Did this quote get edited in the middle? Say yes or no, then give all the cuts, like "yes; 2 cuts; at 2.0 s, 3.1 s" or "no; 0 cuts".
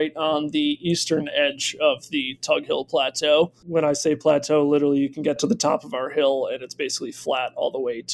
no; 0 cuts